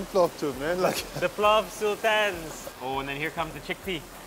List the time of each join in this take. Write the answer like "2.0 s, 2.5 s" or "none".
none

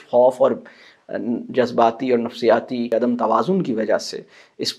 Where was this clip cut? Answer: 2.9 s

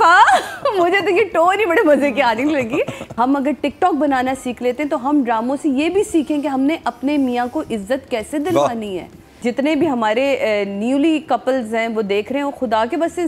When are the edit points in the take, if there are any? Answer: 3.0 s, 9.3 s

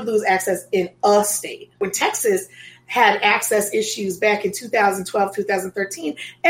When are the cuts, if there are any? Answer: 1.8 s

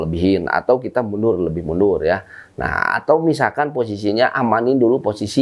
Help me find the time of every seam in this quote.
none

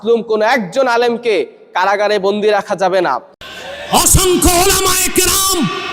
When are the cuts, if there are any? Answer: none

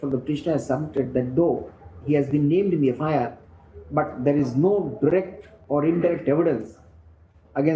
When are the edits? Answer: none

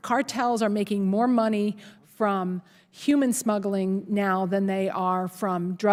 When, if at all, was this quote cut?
none

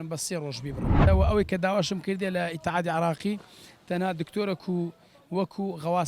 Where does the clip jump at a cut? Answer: 1.0 s

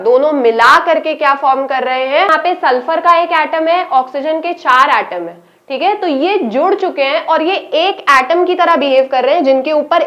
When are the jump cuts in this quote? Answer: 2.3 s

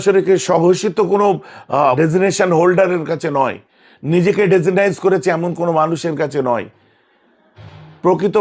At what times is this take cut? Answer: 2.0 s

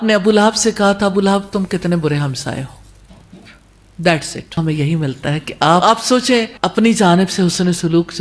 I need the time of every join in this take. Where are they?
4.6 s, 5.8 s, 6.5 s

